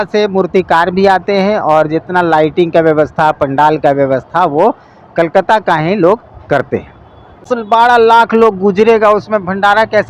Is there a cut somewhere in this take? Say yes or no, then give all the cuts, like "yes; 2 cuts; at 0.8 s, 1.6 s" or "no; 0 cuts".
yes; 1 cut; at 7.5 s